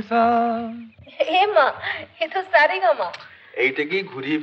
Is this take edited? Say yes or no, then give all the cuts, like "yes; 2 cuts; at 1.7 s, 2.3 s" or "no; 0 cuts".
no; 0 cuts